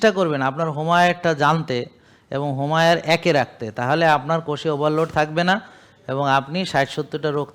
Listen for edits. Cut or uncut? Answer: uncut